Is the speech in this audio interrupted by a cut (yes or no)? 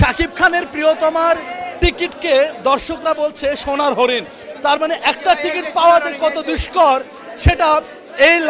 no